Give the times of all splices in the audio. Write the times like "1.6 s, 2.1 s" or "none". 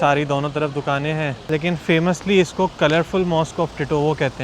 1.3 s